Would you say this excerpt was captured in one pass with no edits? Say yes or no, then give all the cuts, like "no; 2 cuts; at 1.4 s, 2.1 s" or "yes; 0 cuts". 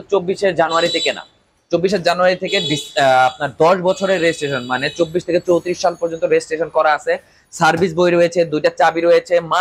yes; 0 cuts